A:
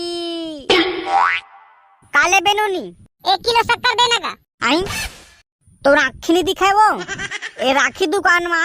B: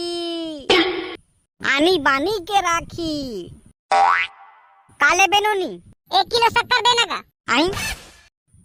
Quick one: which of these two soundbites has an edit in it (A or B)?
A